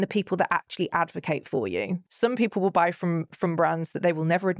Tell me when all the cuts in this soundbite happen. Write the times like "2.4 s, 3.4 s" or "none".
2.1 s